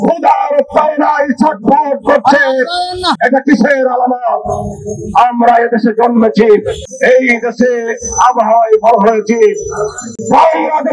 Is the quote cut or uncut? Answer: uncut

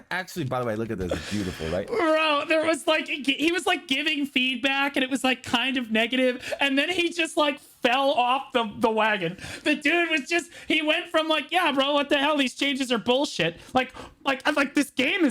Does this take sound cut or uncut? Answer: cut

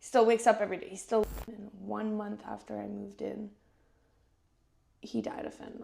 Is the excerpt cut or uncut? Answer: cut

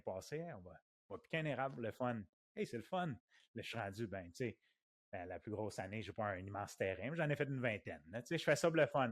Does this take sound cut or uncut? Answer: uncut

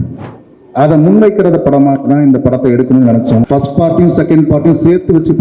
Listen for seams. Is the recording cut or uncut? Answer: cut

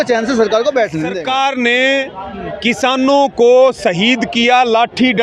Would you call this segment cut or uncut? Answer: cut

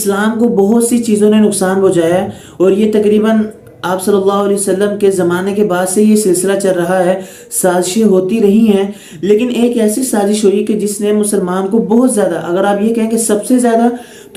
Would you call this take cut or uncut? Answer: uncut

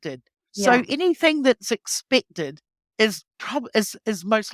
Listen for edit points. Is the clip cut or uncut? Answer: uncut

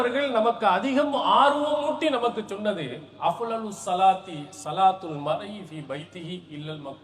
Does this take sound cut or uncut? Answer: uncut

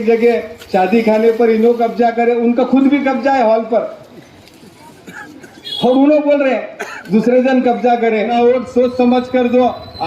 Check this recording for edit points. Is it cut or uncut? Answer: cut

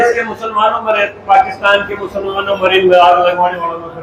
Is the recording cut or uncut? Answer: uncut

